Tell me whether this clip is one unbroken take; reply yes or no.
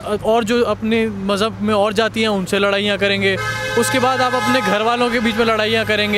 yes